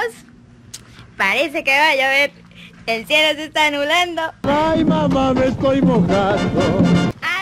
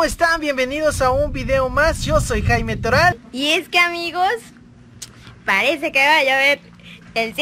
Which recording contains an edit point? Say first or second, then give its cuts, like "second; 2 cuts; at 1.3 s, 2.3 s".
second; 1 cut; at 3.3 s